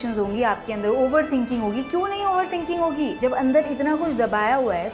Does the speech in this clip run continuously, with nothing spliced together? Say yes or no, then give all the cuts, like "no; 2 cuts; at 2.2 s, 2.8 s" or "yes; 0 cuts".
yes; 0 cuts